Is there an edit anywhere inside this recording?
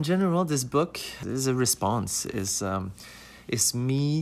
yes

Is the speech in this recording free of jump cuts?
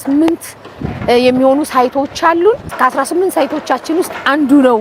yes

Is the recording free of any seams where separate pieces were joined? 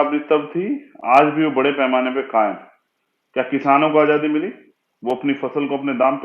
yes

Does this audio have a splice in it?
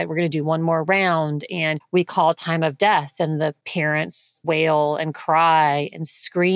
yes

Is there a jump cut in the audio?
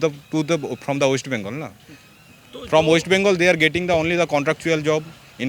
no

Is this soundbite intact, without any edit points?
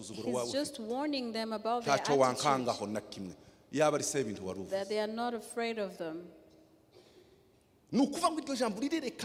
yes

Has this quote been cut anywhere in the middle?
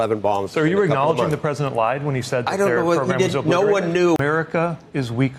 yes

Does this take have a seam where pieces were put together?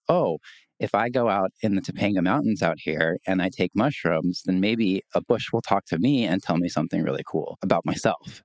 yes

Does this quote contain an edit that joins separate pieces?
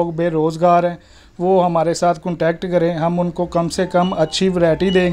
no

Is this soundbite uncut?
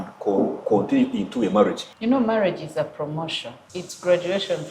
no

